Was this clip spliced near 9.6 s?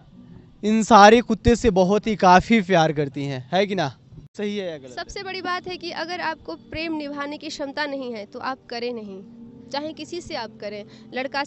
no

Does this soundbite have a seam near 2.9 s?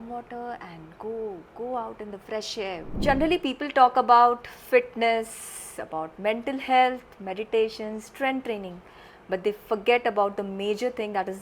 yes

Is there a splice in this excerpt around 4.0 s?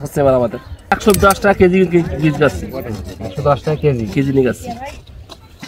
no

